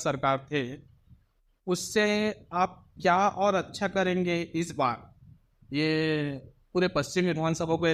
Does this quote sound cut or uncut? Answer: uncut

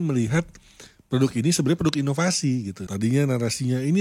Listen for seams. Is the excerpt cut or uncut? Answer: cut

